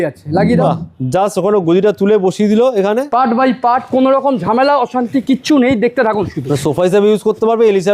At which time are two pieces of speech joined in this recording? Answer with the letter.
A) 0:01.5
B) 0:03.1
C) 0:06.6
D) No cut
B